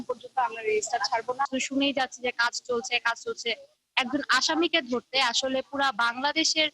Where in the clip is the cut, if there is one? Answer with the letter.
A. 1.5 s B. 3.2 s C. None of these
A